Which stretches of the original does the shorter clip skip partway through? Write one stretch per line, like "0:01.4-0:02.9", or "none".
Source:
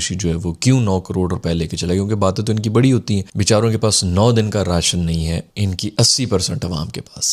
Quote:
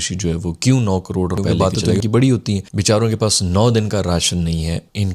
0:01.5-0:02.1